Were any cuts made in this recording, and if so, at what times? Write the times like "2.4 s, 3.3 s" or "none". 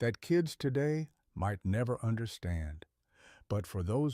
1.2 s

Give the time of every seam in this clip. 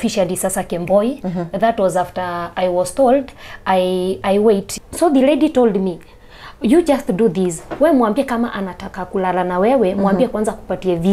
4.8 s

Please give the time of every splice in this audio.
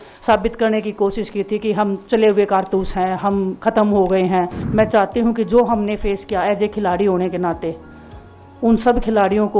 4.6 s

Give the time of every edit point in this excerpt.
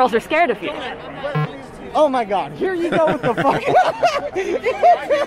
none

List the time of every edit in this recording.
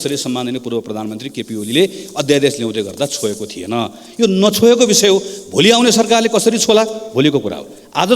none

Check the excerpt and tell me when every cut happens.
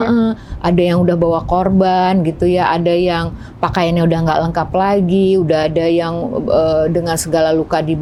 none

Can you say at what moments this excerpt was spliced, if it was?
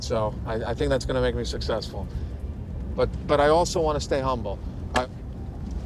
none

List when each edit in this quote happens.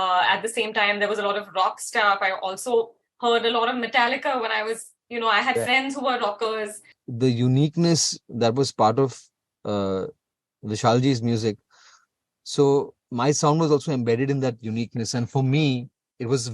6.9 s, 13.0 s

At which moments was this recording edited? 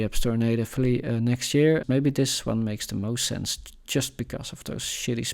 1.8 s

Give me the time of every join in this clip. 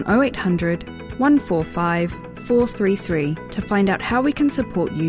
none

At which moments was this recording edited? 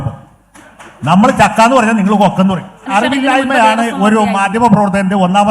2.9 s

